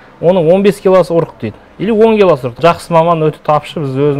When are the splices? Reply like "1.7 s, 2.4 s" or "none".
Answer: 2.6 s

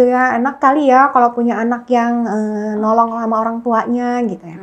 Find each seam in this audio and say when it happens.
none

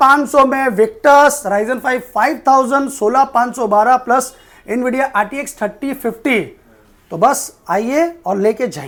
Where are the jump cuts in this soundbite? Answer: none

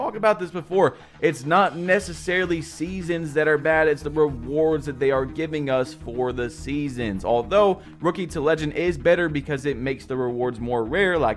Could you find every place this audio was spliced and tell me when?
3.5 s

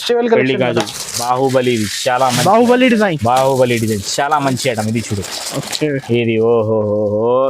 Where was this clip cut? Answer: 1.2 s

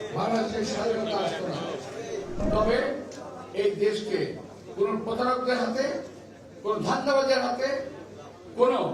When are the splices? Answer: 2.4 s

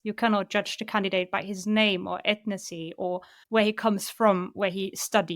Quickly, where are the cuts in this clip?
3.3 s

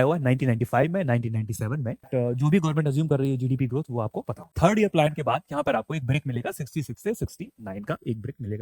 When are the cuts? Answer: 2.1 s, 4.5 s

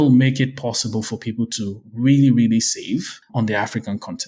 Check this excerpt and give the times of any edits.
3.2 s

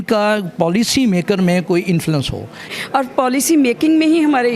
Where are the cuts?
2.7 s

